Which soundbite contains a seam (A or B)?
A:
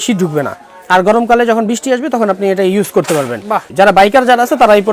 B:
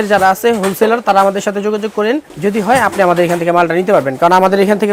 A